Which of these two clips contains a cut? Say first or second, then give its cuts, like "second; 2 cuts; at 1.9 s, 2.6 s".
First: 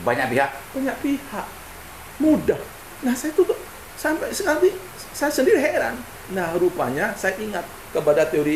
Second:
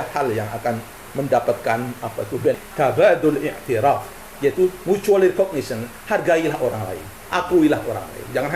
second; 1 cut; at 2.6 s